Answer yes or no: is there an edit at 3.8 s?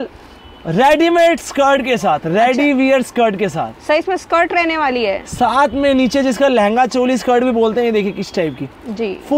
no